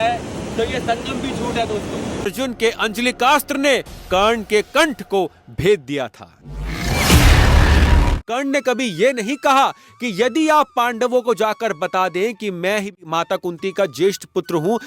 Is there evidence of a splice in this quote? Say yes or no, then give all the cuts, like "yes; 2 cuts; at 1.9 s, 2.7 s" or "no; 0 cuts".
yes; 3 cuts; at 2.3 s, 8.2 s, 13.0 s